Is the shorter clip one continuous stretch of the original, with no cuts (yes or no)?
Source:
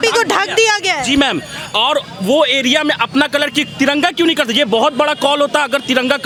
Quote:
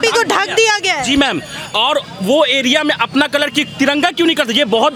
yes